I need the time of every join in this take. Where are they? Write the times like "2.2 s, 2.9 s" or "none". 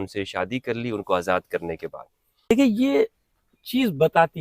2.5 s